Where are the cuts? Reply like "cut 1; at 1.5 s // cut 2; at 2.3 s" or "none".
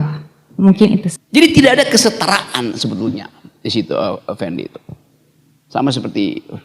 cut 1; at 1.1 s